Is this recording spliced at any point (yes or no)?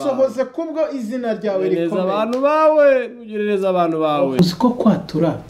yes